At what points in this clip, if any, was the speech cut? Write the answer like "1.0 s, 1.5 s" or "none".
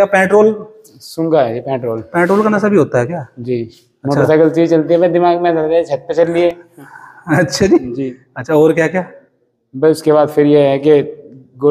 none